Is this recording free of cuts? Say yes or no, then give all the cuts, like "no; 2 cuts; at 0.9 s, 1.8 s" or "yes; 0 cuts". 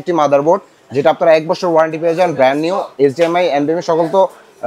yes; 0 cuts